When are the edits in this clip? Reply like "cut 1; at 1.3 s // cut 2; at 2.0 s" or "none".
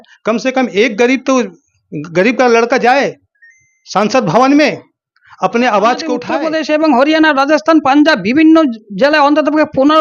cut 1; at 6.3 s